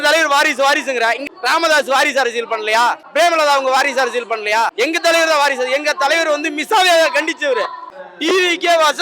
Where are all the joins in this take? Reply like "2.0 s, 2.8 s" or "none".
1.2 s, 3.0 s, 4.7 s, 8.0 s